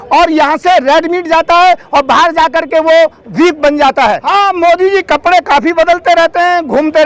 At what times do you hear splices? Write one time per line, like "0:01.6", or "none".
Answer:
0:04.2